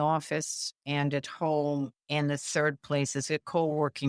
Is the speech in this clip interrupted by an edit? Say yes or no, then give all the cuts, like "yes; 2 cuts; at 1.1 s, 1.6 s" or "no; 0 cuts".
no; 0 cuts